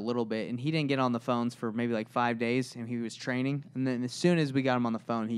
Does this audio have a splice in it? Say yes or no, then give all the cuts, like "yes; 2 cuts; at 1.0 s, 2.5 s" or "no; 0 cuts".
no; 0 cuts